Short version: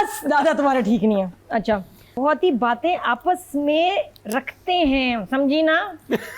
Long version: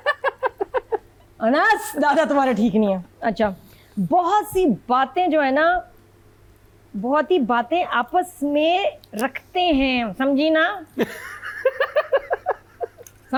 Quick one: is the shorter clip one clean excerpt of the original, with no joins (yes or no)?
no